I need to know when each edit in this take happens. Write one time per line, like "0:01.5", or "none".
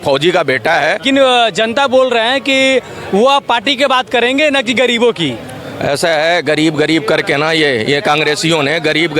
0:01.0